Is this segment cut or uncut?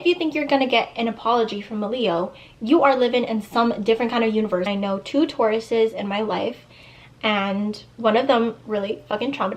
cut